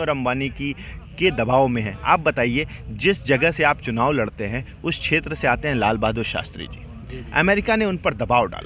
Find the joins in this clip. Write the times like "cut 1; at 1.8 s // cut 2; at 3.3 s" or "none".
none